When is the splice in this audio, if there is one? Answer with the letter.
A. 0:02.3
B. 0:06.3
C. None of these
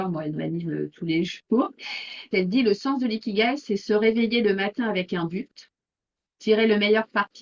A